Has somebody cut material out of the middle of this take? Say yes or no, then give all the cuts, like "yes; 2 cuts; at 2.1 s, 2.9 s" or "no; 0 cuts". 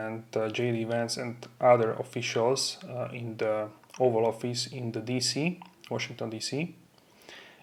no; 0 cuts